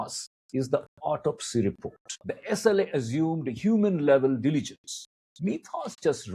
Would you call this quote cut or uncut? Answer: cut